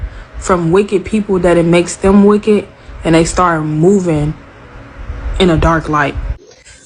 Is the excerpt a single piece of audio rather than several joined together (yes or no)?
no